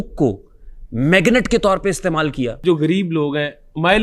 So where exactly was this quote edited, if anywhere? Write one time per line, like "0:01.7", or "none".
0:02.6